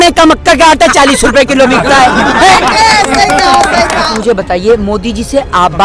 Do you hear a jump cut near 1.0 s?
no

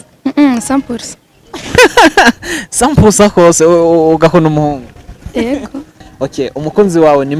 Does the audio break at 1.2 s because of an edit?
no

